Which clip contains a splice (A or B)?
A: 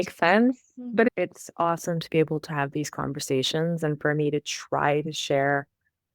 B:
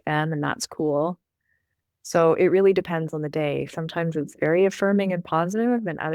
A